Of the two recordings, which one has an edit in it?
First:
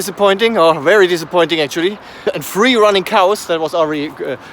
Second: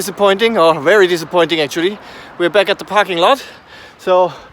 first; 1 cut; at 2.2 s

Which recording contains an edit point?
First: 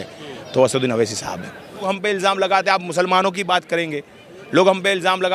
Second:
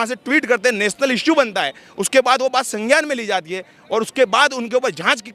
first; 1 cut; at 1.8 s

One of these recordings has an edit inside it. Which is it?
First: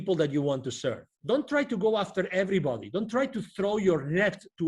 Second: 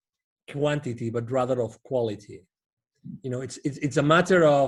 first; 1 cut; at 1.1 s

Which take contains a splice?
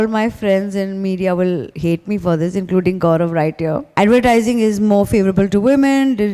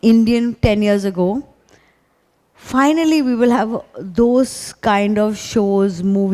first; 1 cut; at 3.8 s

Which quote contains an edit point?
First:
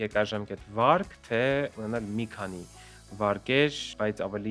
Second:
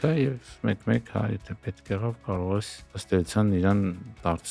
first; 1 cut; at 1.7 s

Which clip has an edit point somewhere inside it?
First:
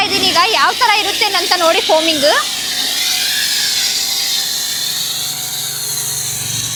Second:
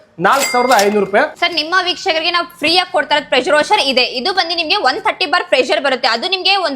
second; 1 cut; at 1.4 s

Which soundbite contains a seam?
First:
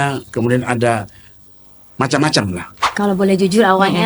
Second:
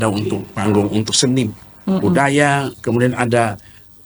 first; 1 cut; at 2.8 s

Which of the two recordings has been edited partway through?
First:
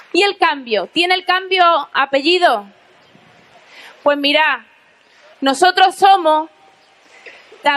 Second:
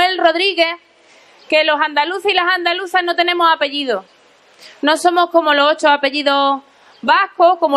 first; 1 cut; at 5.6 s

